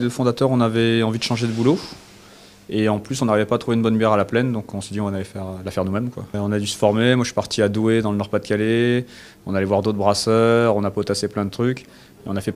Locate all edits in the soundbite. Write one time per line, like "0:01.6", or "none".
0:10.7